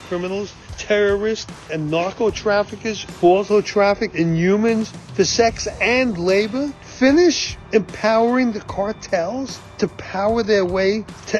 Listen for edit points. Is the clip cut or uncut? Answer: cut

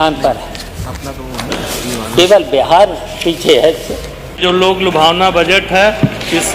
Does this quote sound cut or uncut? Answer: cut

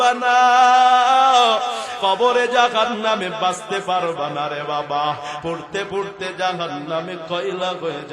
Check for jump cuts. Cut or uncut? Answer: cut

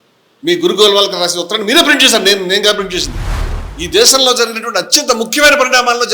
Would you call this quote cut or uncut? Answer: cut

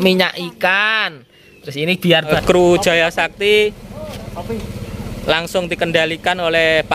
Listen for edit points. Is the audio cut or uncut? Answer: cut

